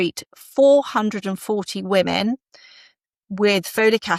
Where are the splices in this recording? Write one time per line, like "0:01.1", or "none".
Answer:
none